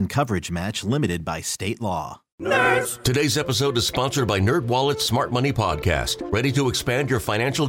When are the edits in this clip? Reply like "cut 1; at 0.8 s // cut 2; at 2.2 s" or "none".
cut 1; at 2.2 s